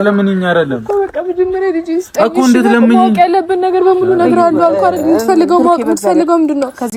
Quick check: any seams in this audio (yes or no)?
no